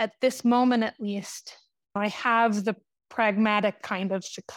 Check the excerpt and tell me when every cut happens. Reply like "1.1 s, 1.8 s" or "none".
2.0 s